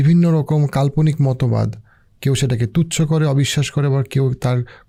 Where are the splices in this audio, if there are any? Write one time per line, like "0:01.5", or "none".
none